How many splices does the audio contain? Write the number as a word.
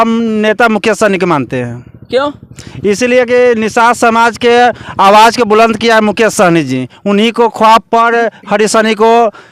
zero